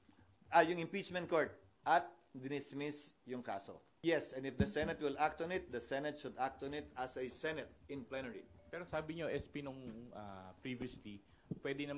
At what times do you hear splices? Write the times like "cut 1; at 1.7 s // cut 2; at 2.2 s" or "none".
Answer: cut 1; at 3.8 s